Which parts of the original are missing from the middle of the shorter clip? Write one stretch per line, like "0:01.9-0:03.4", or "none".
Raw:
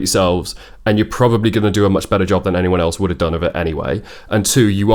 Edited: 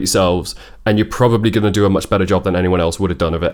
none